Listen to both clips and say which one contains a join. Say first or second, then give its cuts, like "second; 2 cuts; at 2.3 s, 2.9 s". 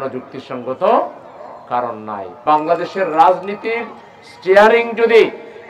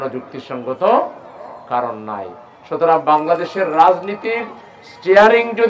first; 1 cut; at 2.4 s